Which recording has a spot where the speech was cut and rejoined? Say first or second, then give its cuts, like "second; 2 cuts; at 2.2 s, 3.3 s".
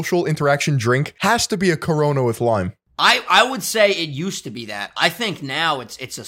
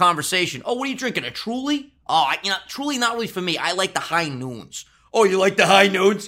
first; 2 cuts; at 1.1 s, 2.8 s